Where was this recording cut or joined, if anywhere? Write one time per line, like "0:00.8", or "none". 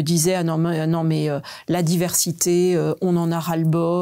none